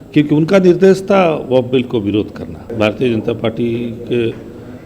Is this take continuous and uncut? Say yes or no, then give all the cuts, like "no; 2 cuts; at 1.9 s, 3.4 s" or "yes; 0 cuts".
no; 1 cut; at 2.7 s